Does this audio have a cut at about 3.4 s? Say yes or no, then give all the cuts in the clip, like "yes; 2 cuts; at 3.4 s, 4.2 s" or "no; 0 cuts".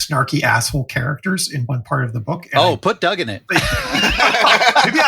yes; 1 cut; at 3.4 s